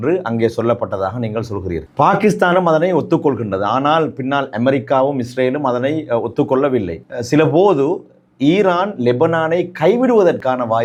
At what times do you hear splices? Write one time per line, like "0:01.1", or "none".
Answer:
none